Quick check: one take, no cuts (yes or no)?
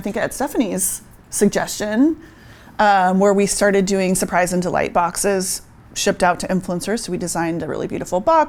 yes